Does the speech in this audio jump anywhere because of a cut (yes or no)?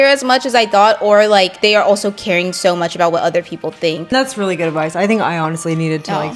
yes